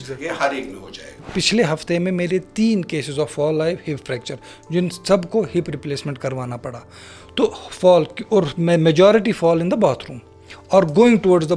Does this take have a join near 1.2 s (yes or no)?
yes